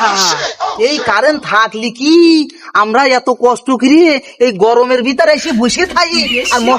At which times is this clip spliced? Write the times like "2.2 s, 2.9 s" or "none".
none